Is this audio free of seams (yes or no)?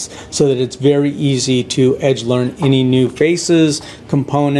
yes